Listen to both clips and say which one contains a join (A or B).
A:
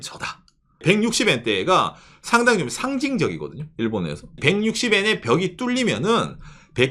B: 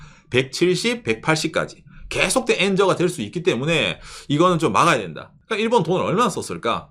A